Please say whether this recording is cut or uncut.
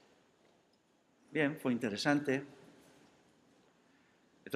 cut